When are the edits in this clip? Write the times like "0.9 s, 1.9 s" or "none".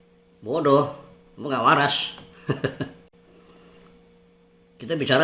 none